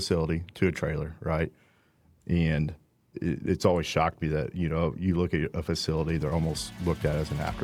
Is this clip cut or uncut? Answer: uncut